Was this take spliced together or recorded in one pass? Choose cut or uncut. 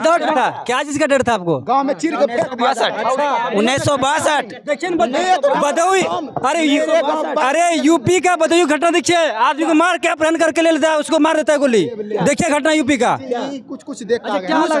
uncut